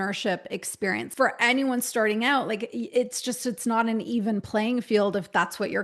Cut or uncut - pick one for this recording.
cut